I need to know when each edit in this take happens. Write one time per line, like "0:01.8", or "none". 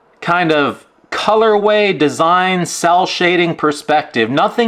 none